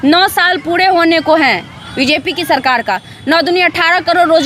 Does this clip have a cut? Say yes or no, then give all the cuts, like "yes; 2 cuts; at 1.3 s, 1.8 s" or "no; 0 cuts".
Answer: no; 0 cuts